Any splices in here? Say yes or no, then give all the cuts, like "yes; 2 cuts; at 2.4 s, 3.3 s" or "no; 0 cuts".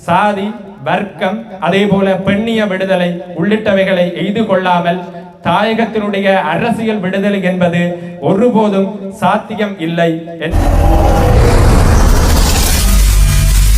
yes; 1 cut; at 10.5 s